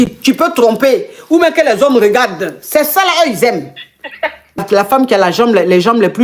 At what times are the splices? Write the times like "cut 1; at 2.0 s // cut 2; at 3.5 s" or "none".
cut 1; at 4.6 s